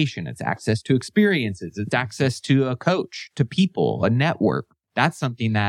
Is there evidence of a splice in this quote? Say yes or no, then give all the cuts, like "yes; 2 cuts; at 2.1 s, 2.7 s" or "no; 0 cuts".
yes; 1 cut; at 4.7 s